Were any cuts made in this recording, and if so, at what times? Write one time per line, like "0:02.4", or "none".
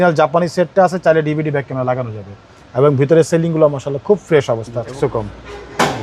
0:05.0